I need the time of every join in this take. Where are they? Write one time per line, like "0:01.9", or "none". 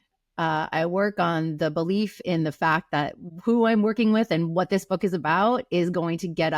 0:03.2